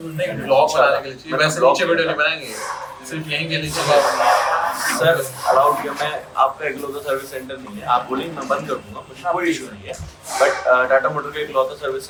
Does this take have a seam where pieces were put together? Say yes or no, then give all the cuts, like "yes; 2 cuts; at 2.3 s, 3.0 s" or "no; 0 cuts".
no; 0 cuts